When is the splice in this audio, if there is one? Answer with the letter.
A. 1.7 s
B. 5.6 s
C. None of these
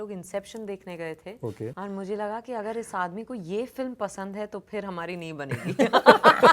A